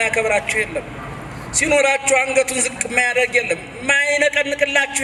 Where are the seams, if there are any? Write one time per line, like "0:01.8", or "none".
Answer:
none